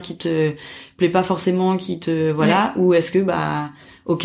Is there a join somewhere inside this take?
no; 0 cuts

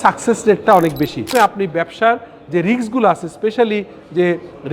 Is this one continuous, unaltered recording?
no; 1 cut; at 1.2 s

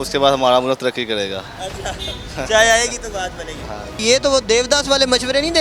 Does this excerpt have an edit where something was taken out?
no; 0 cuts

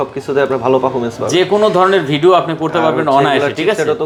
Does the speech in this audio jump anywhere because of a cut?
no; 0 cuts

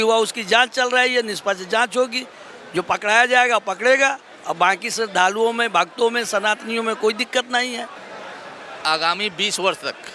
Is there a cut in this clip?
yes; 1 cut; at 8.0 s

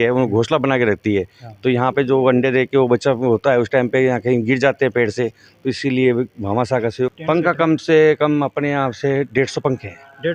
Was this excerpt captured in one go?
no; 1 cut; at 7.1 s

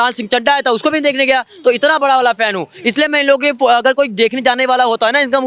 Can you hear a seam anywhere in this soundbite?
no; 0 cuts

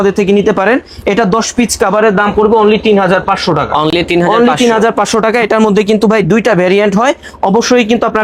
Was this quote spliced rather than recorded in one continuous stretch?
no; 0 cuts

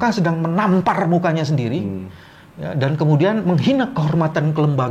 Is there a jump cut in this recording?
no; 0 cuts

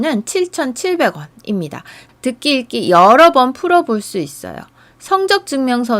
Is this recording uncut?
no; 1 cut; at 2.0 s

